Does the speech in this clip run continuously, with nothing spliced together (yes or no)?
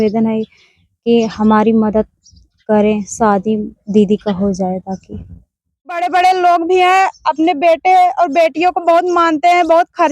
no